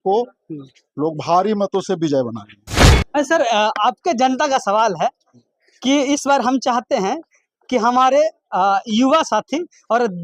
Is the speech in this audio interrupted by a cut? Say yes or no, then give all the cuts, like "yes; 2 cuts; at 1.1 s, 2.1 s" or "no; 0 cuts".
yes; 1 cut; at 2.9 s